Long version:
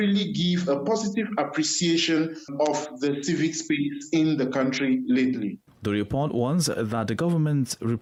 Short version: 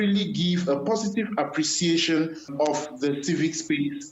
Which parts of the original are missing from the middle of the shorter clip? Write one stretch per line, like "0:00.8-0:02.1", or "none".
none